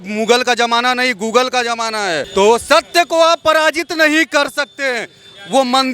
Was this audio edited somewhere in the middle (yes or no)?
yes